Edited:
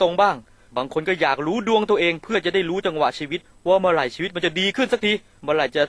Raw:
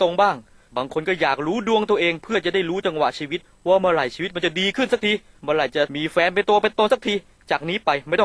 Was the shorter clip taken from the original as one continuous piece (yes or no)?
yes